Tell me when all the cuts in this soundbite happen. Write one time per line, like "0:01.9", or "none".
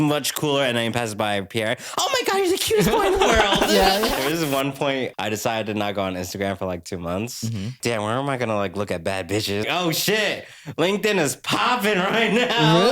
0:04.2
0:05.1
0:07.8
0:09.7